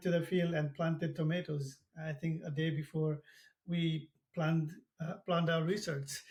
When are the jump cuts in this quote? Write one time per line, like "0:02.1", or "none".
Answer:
none